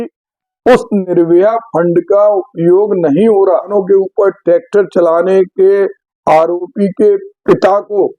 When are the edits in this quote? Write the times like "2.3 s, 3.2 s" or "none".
3.7 s